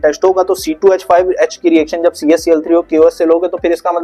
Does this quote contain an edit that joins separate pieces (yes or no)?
no